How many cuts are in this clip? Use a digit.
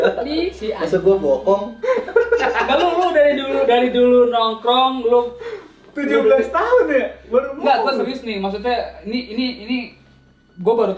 0